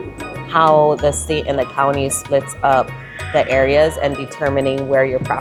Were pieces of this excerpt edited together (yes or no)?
no